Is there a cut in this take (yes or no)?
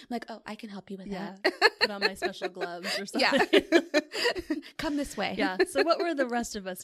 no